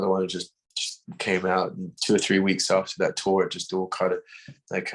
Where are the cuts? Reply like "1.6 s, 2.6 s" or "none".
1.9 s